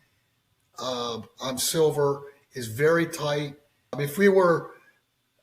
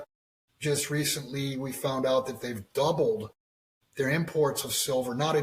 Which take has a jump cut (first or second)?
first